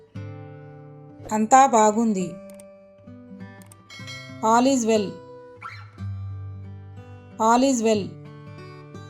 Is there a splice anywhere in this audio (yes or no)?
yes